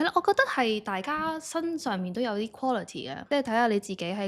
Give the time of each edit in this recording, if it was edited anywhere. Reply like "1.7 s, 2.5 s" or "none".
3.1 s

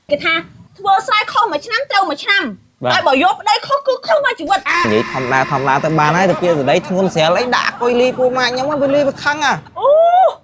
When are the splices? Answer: 4.8 s

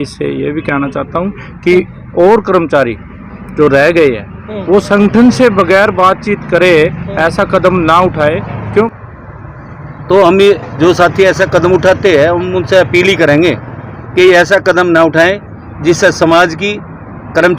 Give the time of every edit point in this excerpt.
8.8 s

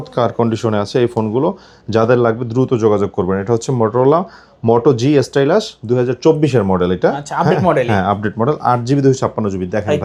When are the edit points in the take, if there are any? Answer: none

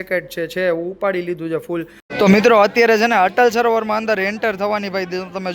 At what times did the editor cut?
2.0 s

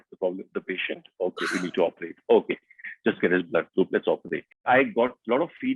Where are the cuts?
4.6 s

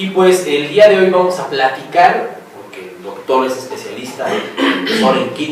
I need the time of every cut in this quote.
1.4 s

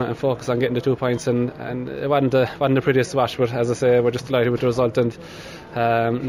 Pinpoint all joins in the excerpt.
none

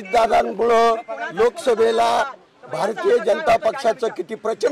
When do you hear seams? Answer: none

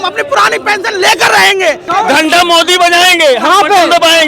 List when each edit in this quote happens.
1.9 s

